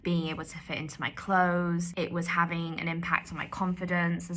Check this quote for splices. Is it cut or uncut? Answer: cut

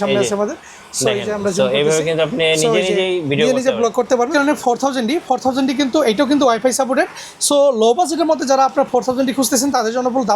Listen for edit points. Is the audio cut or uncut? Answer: cut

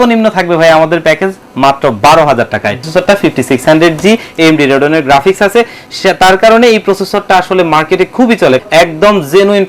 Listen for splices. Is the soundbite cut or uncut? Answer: cut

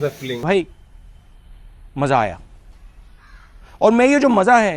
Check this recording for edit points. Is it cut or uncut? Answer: uncut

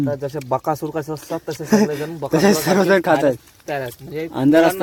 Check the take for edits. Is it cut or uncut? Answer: uncut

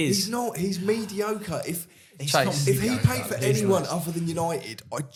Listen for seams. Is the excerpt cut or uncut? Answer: uncut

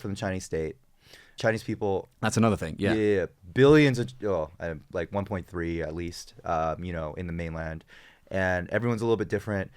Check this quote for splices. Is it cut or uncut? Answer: cut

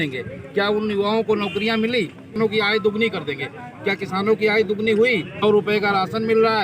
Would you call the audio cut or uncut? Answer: cut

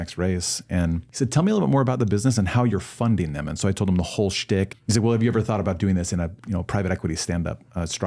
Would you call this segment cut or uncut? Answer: cut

